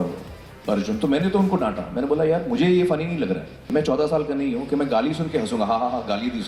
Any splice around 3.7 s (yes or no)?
yes